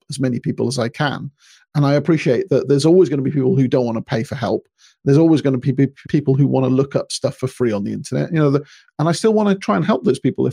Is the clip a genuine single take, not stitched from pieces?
yes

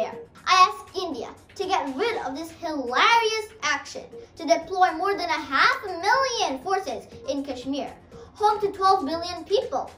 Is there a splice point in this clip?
no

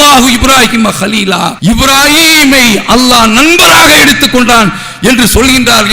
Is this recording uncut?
no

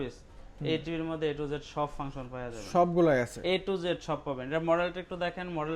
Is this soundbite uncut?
yes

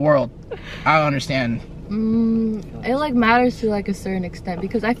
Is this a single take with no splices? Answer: yes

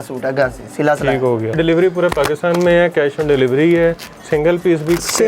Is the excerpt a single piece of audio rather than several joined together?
no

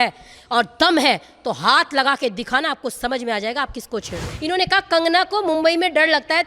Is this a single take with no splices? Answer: no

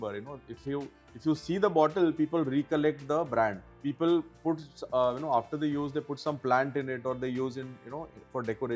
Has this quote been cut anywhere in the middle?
yes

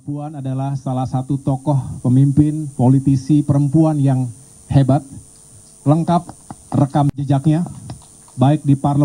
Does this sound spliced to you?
no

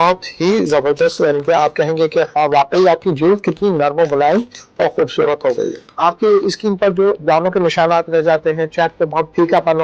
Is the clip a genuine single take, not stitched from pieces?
no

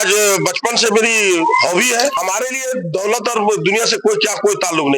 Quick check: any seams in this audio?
yes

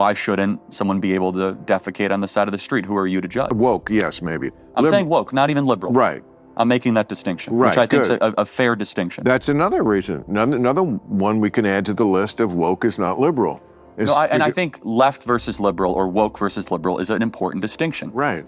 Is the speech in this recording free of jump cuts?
no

